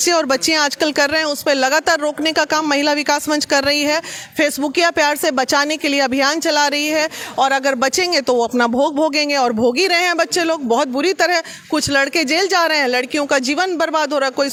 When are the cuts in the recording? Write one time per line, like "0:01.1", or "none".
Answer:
none